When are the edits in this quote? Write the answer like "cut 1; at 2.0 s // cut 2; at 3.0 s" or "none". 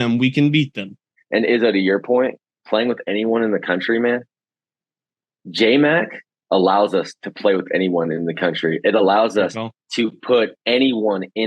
cut 1; at 1.1 s